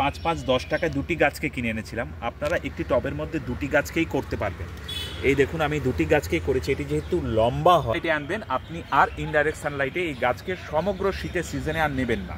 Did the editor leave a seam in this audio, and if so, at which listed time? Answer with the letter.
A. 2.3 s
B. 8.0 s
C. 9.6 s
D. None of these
B